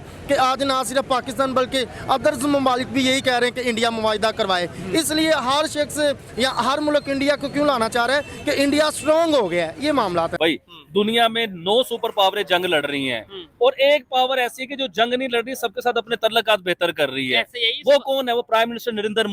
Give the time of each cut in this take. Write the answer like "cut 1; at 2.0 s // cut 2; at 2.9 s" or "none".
cut 1; at 10.4 s